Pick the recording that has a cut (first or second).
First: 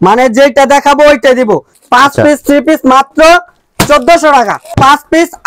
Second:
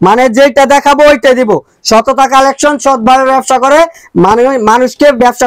first